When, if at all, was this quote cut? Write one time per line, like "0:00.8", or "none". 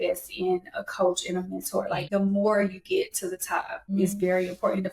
0:02.0
0:03.9

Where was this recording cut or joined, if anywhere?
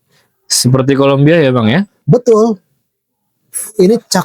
none

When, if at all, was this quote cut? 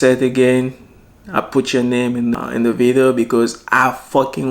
0:02.3

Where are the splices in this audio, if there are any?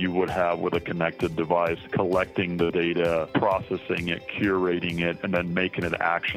0:01.8
0:03.3

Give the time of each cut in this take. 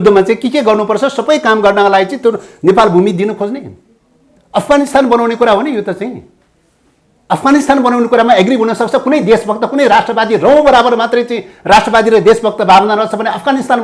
none

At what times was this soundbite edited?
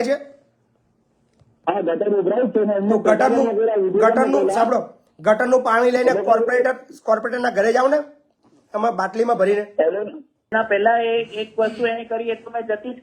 0:10.5

